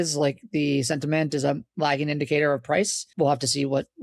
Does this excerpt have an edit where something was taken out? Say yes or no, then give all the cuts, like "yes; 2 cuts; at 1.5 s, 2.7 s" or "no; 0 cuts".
yes; 1 cut; at 3.0 s